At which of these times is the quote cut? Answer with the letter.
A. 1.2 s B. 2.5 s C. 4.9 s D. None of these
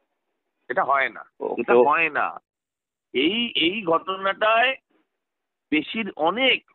A